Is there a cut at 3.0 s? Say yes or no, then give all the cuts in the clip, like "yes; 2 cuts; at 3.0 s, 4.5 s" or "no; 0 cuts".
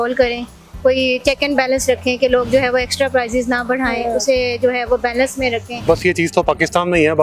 no; 1 cut; at 5.8 s